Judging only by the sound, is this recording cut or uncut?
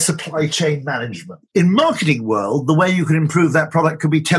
cut